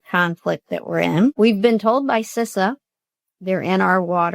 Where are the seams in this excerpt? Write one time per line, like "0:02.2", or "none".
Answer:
0:01.3